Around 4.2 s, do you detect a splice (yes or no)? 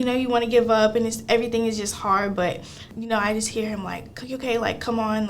no